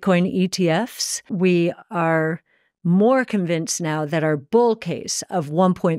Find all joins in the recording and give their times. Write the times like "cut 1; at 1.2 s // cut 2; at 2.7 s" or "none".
cut 1; at 1.3 s